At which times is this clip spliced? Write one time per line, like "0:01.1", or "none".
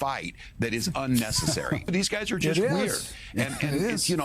0:01.9